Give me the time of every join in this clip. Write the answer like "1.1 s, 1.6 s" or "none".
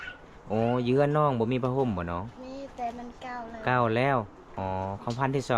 4.4 s